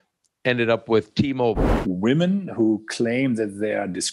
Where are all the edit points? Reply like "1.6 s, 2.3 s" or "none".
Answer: 1.7 s